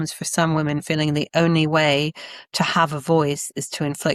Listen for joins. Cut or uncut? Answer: uncut